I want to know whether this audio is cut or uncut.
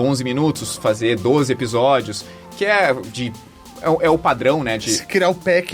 uncut